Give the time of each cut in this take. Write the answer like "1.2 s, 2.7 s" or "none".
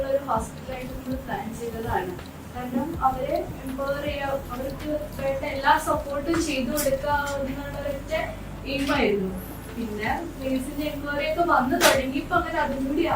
none